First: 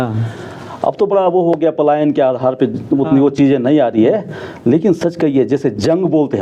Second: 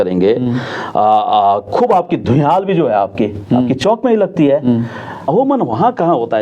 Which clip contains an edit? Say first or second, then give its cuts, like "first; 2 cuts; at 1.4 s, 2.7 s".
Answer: second; 1 cut; at 5.2 s